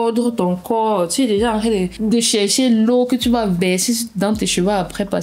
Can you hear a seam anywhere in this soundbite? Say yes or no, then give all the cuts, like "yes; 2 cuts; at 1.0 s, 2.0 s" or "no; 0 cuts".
yes; 1 cut; at 1.9 s